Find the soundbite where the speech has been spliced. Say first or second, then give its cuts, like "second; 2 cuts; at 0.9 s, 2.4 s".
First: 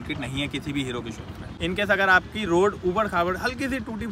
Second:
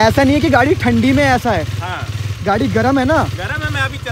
first; 1 cut; at 1.5 s